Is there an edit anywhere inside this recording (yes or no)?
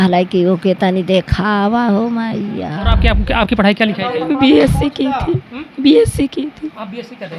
yes